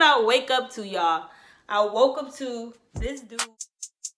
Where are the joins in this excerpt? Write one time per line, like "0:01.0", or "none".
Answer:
0:03.3